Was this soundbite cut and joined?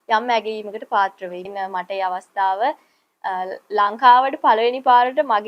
yes; 1 cut; at 1.3 s

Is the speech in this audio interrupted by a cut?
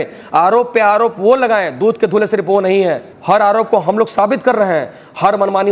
yes; 1 cut; at 3.1 s

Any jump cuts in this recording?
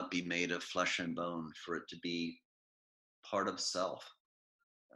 no; 0 cuts

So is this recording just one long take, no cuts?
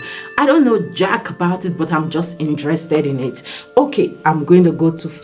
yes; 0 cuts

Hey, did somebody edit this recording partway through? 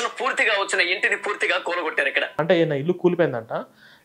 yes; 1 cut; at 2.4 s

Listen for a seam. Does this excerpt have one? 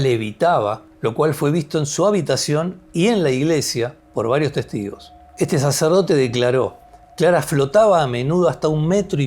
yes; 2 cuts; at 0.9 s, 4.0 s

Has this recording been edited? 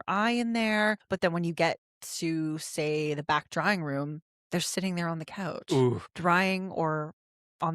yes; 2 cuts; at 1.0 s, 6.1 s

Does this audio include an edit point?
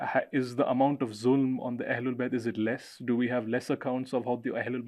no; 0 cuts

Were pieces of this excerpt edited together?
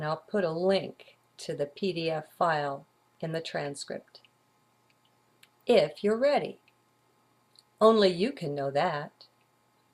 no; 0 cuts

